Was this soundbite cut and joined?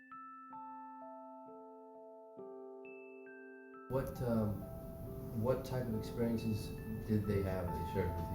no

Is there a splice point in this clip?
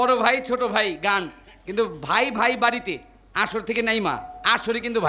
no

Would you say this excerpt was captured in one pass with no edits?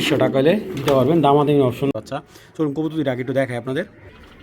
no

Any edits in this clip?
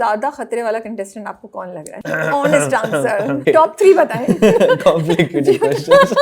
yes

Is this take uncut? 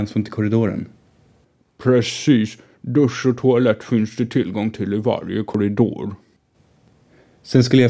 no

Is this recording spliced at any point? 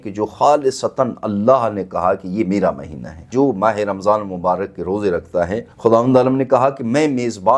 yes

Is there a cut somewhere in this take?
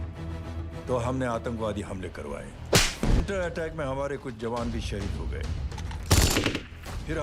yes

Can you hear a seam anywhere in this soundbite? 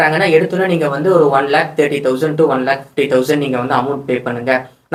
no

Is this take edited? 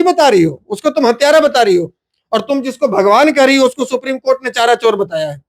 no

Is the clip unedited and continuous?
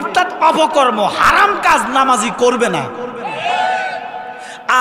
yes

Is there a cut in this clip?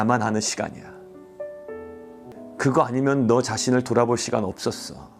yes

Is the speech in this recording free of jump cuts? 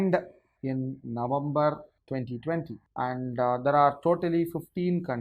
no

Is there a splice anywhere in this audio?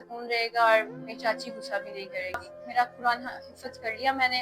yes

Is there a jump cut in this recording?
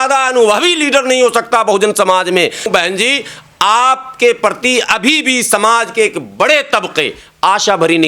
yes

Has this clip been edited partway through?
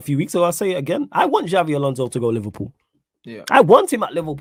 no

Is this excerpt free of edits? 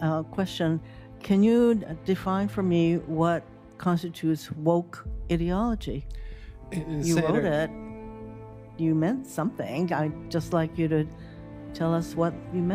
yes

